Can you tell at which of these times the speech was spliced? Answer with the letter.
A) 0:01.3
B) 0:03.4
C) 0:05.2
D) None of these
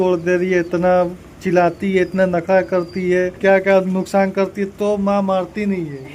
B